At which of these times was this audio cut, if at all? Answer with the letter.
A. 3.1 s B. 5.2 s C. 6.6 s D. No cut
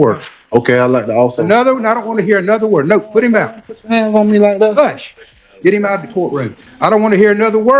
C